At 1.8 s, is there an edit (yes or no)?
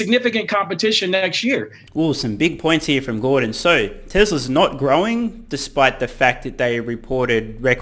no